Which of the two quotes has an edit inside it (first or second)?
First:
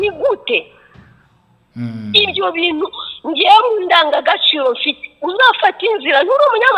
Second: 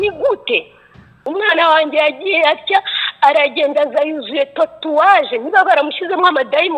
second